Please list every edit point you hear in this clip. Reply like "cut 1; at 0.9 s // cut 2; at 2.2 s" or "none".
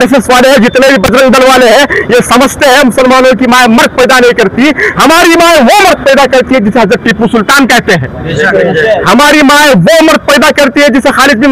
none